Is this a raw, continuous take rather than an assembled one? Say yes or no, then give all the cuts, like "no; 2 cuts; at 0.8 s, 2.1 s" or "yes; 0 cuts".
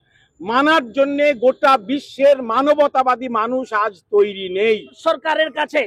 no; 1 cut; at 5.0 s